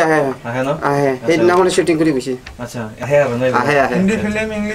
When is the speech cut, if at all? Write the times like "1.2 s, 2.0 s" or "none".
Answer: 3.0 s